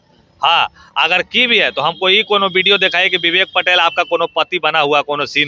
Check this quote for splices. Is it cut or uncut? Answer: uncut